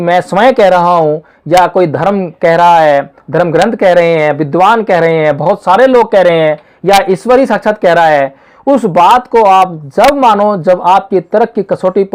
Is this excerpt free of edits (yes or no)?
yes